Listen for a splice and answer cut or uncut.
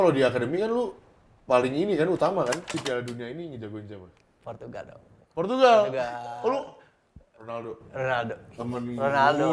cut